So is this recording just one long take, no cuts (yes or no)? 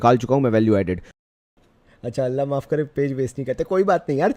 no